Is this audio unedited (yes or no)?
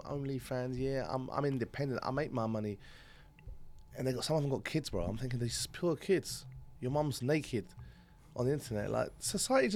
yes